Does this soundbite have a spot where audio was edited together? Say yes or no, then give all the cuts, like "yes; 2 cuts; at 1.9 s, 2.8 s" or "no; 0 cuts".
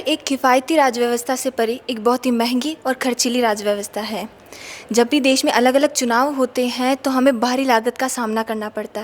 no; 0 cuts